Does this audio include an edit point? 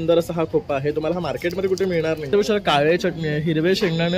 yes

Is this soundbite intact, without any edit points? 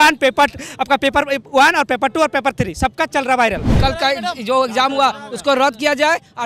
no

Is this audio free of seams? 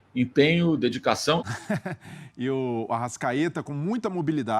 no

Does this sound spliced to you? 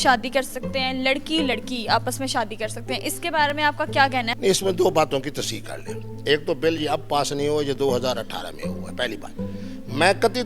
no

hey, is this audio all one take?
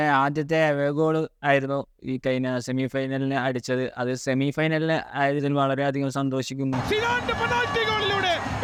yes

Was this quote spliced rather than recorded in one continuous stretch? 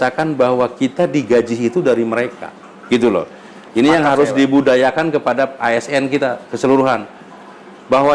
no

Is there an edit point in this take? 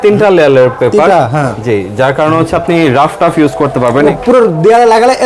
yes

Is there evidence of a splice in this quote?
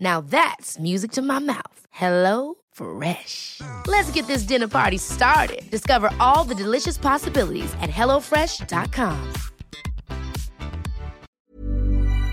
yes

